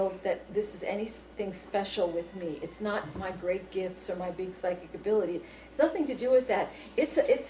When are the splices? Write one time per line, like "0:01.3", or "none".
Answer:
0:05.6